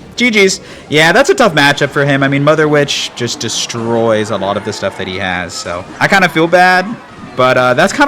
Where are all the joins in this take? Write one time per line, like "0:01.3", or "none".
0:05.9